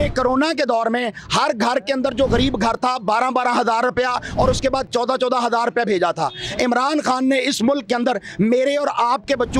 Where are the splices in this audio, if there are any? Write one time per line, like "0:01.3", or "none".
none